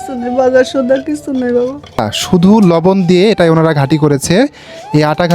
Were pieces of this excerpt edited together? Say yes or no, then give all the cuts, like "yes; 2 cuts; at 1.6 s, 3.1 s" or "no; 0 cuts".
yes; 1 cut; at 2.0 s